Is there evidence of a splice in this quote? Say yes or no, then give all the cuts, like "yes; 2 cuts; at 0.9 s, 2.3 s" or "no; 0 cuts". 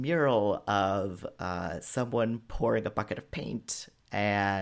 no; 0 cuts